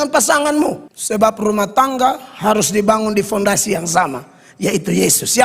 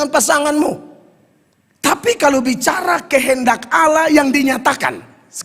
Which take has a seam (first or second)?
first